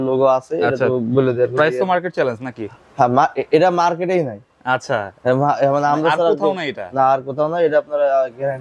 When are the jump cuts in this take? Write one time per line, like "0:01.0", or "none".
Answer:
none